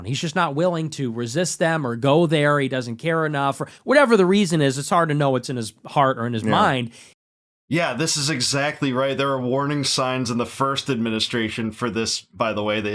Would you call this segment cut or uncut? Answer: uncut